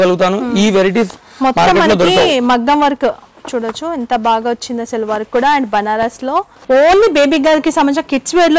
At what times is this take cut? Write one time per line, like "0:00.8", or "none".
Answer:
0:06.5